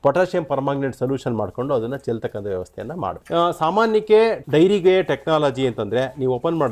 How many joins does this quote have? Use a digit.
2